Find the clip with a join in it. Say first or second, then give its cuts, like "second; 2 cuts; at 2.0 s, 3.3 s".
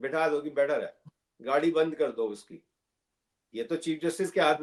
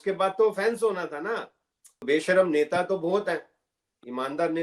second; 1 cut; at 2.0 s